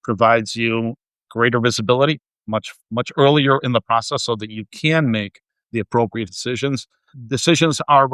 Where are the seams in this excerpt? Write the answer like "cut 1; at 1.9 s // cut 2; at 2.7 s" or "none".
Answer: none